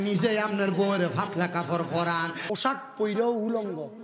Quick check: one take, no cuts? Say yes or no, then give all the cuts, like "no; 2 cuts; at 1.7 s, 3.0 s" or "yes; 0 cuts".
no; 1 cut; at 2.4 s